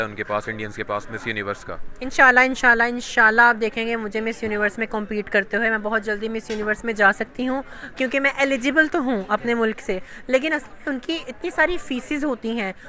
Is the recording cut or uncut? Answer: uncut